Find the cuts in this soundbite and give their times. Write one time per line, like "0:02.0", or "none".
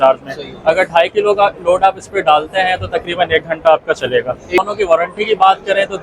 0:04.6